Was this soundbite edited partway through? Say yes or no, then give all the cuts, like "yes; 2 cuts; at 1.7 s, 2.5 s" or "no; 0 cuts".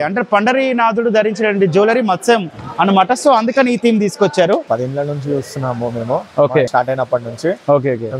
yes; 1 cut; at 4.6 s